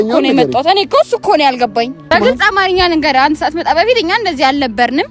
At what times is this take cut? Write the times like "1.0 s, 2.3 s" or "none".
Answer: 2.1 s